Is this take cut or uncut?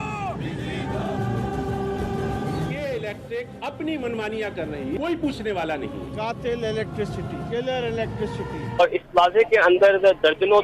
cut